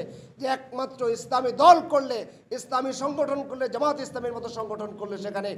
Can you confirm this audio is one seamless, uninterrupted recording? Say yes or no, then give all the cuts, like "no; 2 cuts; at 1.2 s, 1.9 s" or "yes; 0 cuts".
yes; 0 cuts